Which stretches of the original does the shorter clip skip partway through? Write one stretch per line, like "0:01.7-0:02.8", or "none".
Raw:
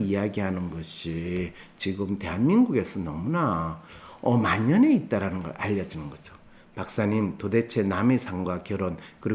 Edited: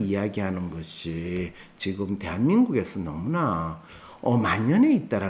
none